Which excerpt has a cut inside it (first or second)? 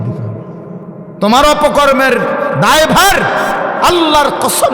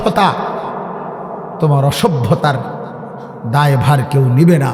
first